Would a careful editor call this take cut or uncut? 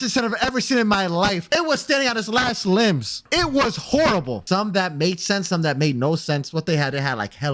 cut